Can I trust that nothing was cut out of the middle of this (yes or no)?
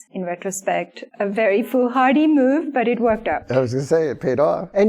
no